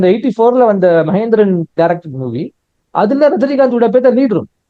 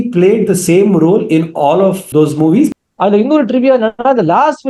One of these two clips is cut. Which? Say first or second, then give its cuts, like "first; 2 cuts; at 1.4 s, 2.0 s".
second; 2 cuts; at 2.0 s, 2.7 s